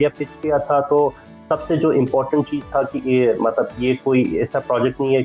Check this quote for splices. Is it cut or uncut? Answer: uncut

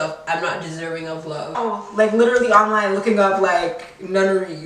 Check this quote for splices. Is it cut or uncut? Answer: cut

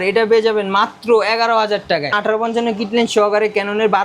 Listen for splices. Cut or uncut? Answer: cut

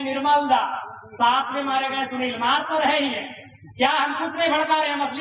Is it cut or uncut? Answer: uncut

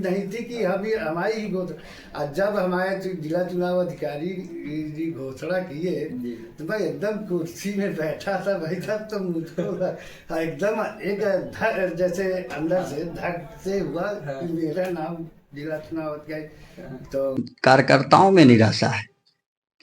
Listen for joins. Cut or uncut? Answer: cut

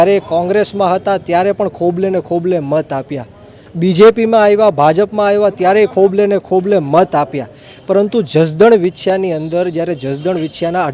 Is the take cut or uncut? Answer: uncut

